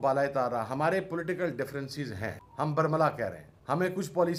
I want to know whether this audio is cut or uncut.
cut